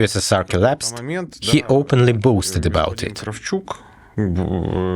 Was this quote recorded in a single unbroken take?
yes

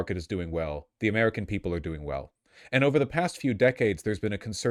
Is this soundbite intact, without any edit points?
yes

